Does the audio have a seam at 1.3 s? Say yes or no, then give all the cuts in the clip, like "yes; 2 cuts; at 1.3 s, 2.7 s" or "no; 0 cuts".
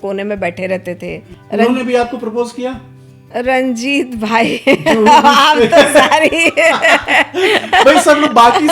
yes; 1 cut; at 1.3 s